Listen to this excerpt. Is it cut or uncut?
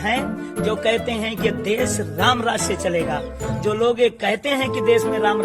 uncut